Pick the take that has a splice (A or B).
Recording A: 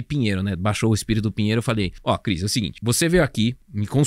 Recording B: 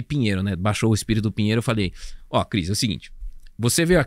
A